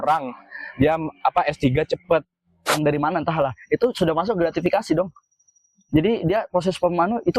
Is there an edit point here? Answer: yes; 1 cut; at 2.7 s

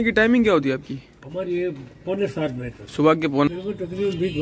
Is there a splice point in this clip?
yes; 1 cut; at 3.5 s

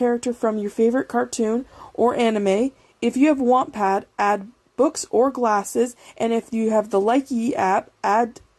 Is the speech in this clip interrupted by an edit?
no; 0 cuts

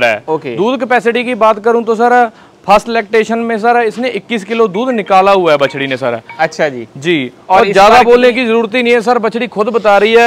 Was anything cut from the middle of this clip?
no; 0 cuts

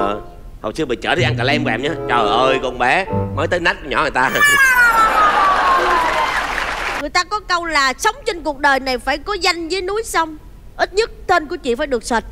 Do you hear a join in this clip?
yes; 1 cut; at 6.9 s

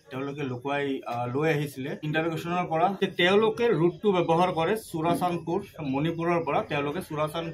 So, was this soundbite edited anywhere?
yes; 2 cuts; at 2.0 s, 3.0 s

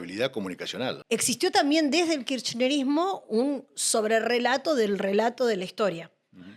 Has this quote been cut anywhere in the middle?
yes; 1 cut; at 1.0 s

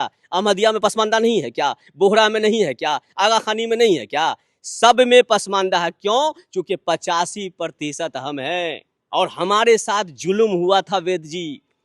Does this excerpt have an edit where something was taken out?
yes; 1 cut; at 8.9 s

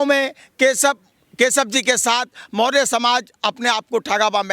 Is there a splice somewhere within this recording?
no; 0 cuts

